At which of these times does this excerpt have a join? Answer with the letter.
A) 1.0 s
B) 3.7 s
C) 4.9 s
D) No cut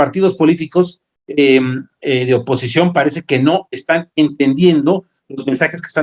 D